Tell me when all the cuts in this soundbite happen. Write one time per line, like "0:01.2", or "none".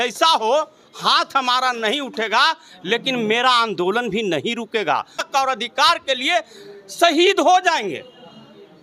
0:05.3